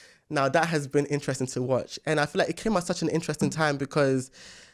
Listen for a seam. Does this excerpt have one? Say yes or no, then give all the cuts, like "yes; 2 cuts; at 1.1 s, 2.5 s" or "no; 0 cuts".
no; 0 cuts